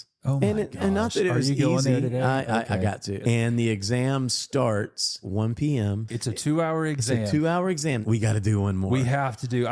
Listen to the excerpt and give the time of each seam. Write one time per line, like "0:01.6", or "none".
0:03.2
0:05.2
0:06.1
0:08.0